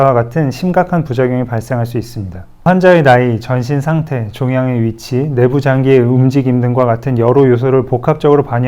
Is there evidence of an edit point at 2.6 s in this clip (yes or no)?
yes